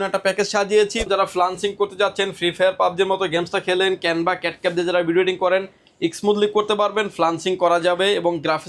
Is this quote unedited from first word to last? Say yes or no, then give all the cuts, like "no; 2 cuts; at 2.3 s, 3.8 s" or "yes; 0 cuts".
no; 1 cut; at 1.1 s